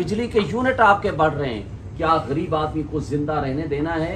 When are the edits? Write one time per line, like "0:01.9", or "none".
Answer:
none